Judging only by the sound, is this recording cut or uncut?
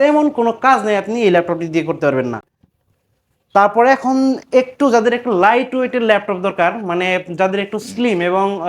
uncut